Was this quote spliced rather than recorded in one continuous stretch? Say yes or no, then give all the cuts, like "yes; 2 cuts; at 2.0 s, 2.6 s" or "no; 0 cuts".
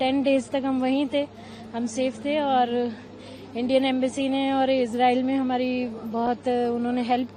no; 0 cuts